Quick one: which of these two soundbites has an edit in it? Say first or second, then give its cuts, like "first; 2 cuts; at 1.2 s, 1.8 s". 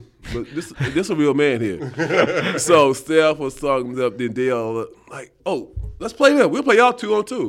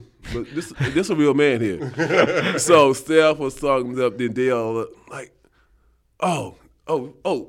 first; 1 cut; at 5.3 s